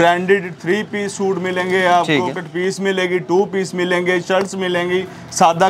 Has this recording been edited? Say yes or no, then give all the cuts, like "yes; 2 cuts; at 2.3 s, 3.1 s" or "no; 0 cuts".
no; 0 cuts